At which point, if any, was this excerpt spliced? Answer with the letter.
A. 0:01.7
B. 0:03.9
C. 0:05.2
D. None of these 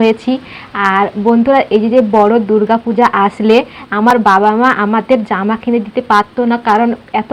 D